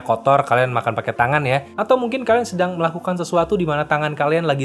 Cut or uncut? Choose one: cut